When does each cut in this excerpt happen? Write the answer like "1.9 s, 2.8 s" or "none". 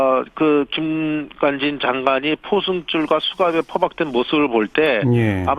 3.7 s